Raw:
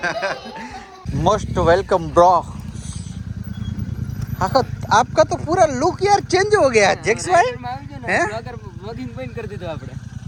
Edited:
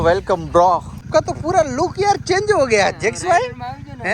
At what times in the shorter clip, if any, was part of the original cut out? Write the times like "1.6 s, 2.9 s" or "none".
1.1 s